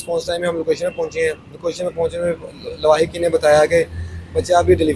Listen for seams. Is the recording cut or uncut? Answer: uncut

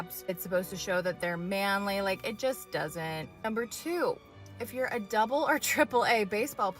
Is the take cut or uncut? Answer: cut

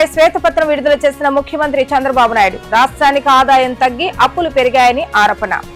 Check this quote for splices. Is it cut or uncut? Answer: uncut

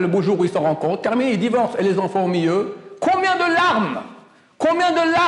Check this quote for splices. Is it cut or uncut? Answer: uncut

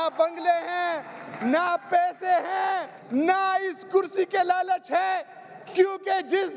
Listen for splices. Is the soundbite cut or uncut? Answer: cut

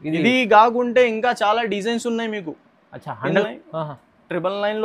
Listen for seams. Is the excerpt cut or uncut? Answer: cut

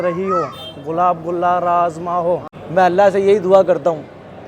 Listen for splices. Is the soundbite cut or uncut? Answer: cut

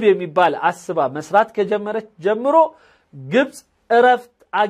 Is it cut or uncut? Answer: uncut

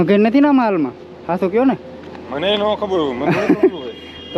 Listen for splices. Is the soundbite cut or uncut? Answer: uncut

